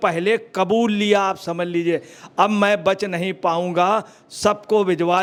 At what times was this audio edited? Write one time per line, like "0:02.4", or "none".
none